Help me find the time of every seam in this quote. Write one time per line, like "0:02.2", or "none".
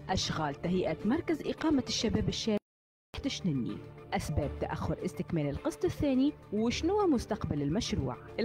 0:03.1